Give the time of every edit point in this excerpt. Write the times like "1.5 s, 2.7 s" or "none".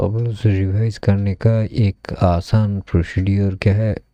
none